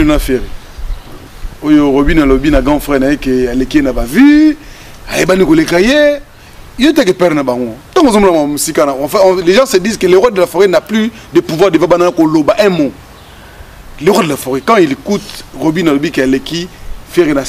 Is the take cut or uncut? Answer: uncut